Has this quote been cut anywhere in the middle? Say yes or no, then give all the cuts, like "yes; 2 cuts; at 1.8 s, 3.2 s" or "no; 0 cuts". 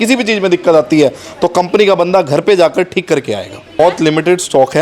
yes; 1 cut; at 3.8 s